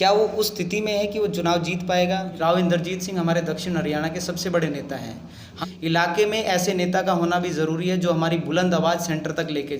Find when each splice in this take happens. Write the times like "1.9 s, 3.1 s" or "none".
2.3 s, 5.5 s